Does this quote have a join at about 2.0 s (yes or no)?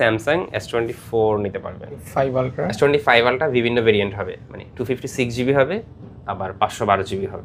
yes